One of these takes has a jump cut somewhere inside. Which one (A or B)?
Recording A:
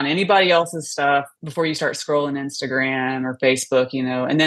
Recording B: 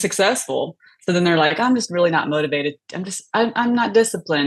A